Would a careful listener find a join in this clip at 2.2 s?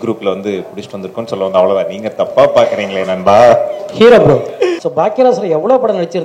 no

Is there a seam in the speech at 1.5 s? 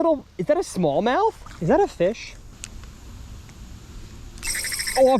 yes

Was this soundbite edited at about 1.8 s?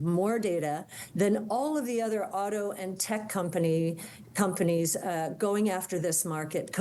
no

